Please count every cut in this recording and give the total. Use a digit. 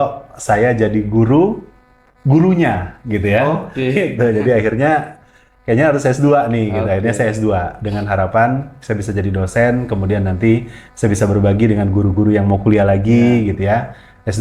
0